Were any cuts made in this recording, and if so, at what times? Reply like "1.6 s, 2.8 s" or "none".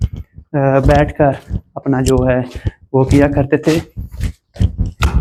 none